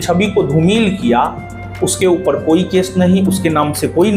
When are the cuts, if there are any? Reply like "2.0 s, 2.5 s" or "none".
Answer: none